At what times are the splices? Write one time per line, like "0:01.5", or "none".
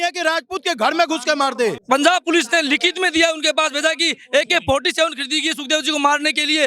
0:01.8